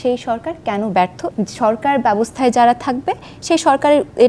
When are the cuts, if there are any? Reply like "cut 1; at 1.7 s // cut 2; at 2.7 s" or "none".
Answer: cut 1; at 1.2 s